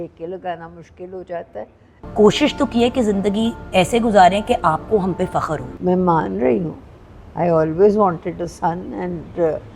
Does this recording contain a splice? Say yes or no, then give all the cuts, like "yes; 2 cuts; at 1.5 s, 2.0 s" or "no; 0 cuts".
yes; 2 cuts; at 2.0 s, 5.7 s